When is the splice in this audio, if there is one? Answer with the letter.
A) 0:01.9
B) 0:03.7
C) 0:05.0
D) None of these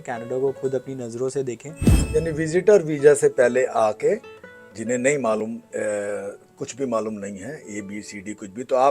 A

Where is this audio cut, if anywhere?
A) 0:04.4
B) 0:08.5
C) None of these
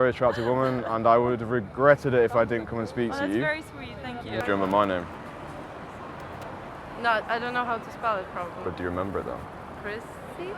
A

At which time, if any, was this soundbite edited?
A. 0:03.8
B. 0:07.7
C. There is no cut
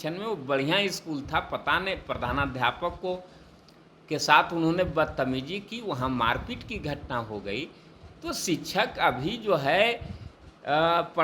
C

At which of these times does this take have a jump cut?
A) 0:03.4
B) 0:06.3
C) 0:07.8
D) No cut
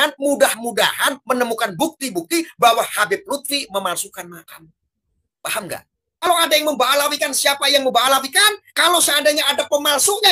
B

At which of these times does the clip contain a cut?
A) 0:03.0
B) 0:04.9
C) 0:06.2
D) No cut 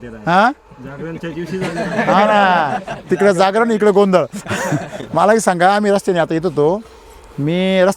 D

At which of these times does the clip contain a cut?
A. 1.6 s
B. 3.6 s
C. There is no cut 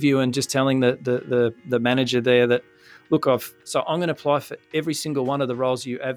B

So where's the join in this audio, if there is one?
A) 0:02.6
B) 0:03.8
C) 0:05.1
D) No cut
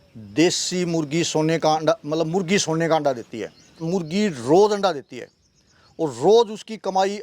B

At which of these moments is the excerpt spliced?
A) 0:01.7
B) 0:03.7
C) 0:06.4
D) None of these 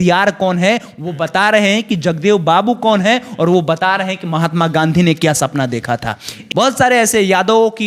C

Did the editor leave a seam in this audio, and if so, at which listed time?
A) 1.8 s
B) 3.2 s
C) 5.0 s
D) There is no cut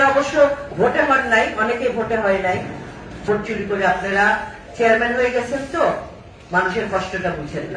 B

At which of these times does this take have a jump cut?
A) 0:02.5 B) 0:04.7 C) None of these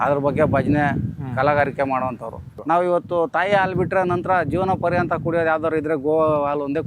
A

